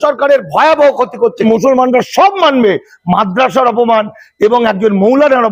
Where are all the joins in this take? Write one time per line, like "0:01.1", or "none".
0:01.4